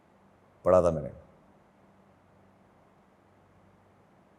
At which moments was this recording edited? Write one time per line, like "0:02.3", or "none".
none